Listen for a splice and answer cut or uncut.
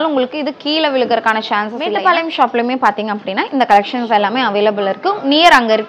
cut